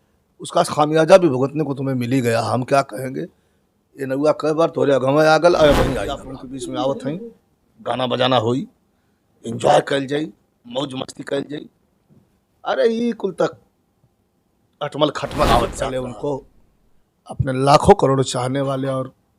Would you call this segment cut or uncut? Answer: cut